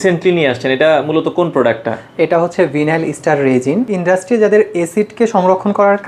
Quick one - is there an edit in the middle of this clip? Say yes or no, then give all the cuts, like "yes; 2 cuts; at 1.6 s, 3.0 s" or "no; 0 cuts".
yes; 1 cut; at 3.9 s